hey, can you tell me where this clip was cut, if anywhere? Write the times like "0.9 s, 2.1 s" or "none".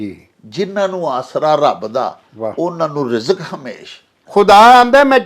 4.2 s